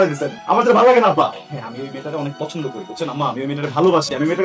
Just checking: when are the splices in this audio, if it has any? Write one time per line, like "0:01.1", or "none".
0:01.4

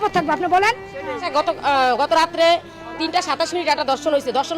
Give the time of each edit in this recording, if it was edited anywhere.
0:01.2

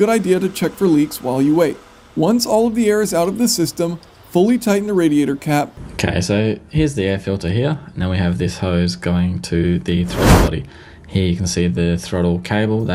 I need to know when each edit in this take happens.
none

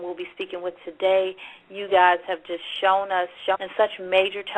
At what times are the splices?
none

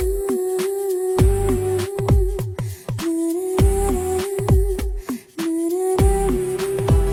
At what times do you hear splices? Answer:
none

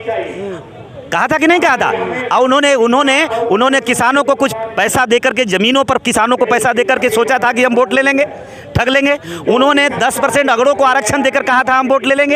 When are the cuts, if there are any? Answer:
none

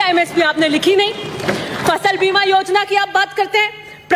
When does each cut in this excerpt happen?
none

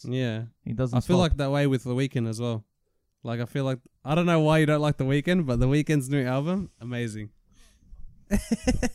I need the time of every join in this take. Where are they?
none

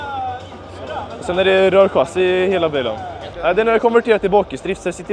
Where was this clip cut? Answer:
0:03.4

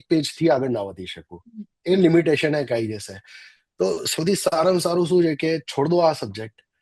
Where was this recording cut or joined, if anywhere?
none

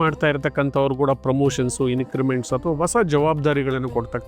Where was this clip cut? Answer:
none

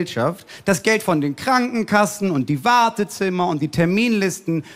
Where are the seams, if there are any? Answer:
none

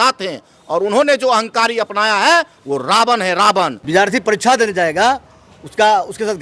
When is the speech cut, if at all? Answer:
0:03.8

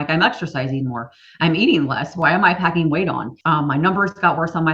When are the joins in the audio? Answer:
0:03.3

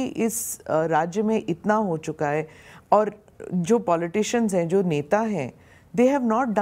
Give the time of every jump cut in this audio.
none

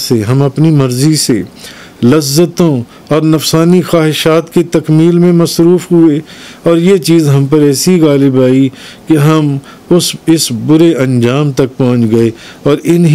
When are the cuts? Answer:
none

